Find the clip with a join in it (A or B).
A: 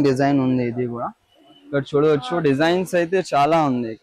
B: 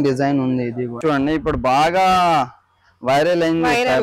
B